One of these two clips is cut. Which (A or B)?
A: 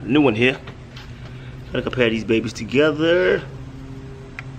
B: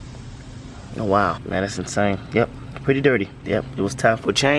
B